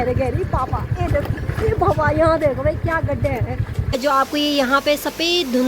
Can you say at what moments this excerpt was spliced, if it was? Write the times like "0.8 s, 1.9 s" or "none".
4.0 s

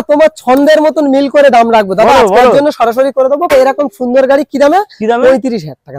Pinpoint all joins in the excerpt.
3.5 s

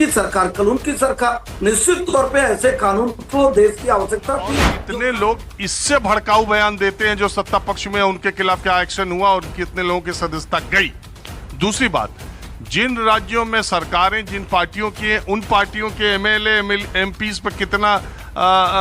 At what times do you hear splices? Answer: 4.8 s

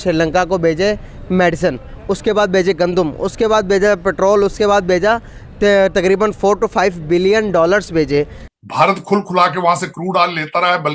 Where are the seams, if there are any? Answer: 8.4 s

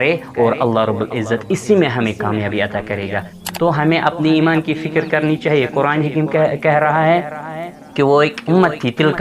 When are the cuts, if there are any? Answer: 3.4 s

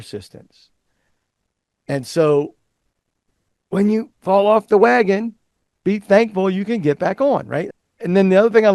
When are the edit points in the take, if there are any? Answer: 7.6 s

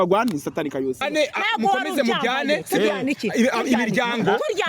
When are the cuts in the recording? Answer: 1.0 s

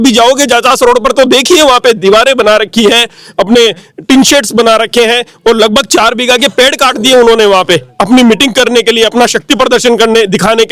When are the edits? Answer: none

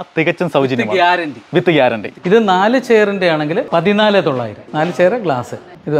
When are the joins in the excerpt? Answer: 2.1 s, 3.7 s, 4.6 s

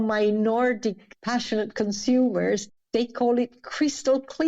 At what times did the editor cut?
1.0 s, 2.6 s

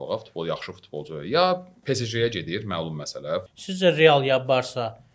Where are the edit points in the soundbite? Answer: 3.5 s

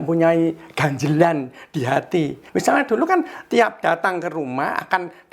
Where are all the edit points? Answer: 2.4 s

